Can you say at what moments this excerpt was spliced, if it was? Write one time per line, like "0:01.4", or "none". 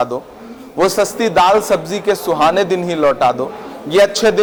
none